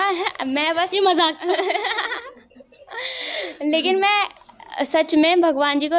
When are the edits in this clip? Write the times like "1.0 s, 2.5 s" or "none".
none